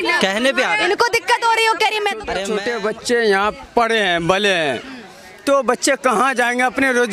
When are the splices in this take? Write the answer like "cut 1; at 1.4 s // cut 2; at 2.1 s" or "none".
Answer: cut 1; at 2.4 s